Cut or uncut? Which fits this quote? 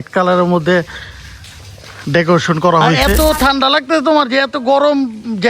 cut